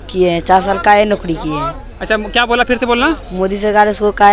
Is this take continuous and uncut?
yes; 0 cuts

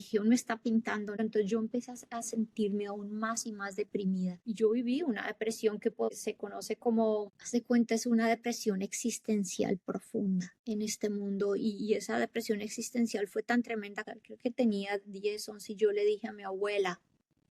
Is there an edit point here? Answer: yes; 3 cuts; at 1.2 s, 10.5 s, 14.2 s

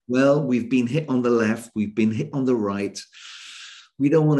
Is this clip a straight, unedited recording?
no; 1 cut; at 2.3 s

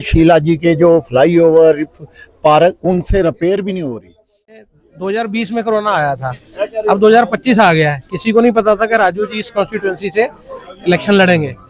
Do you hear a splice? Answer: yes; 1 cut; at 4.6 s

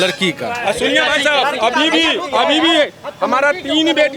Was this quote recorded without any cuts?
yes; 0 cuts

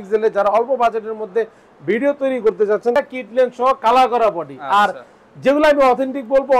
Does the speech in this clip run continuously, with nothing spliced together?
no; 1 cut; at 2.9 s

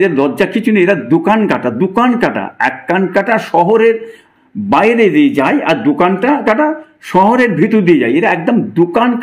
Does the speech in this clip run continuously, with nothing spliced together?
yes; 0 cuts

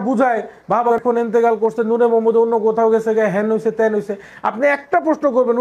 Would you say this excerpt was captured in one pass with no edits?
no; 1 cut; at 0.9 s

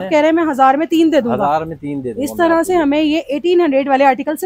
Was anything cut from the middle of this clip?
no; 0 cuts

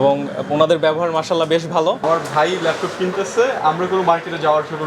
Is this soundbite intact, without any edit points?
no; 1 cut; at 2.0 s

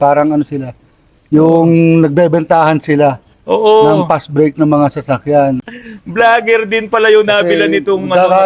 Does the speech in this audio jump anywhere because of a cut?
yes; 1 cut; at 5.6 s

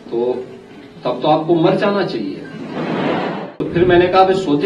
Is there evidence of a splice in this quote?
yes; 1 cut; at 3.6 s

